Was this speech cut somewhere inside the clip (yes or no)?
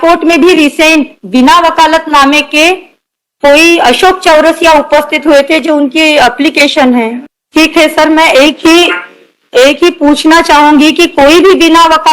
no